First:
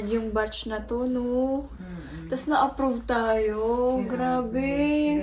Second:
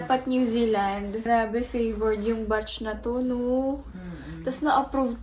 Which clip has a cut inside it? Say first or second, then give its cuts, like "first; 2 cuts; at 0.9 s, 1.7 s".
second; 1 cut; at 1.2 s